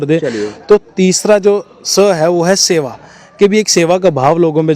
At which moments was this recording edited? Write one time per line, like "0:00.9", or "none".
none